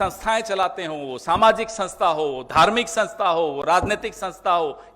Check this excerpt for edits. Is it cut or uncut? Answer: uncut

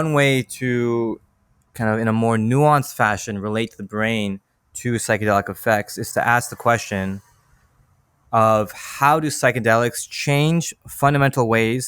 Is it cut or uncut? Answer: uncut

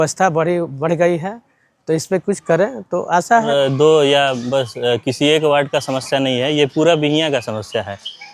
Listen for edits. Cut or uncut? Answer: cut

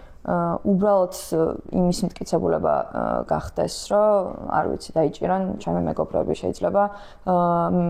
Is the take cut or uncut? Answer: uncut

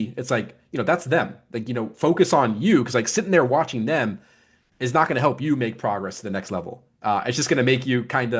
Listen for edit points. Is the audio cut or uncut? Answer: uncut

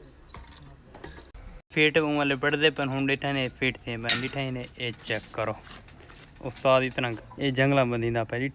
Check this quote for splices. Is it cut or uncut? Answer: cut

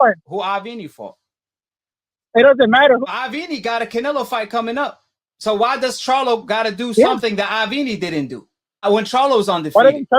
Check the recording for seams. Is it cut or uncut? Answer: cut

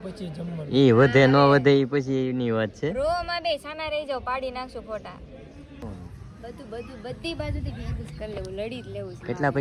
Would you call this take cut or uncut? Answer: cut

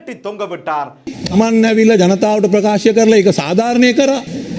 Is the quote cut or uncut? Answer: cut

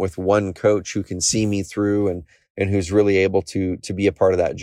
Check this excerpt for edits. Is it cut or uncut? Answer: uncut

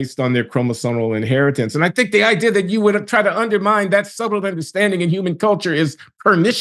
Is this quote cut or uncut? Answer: uncut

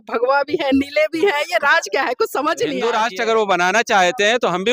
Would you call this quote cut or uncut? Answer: cut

